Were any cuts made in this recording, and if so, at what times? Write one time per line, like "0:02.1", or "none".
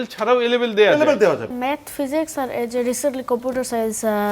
0:01.6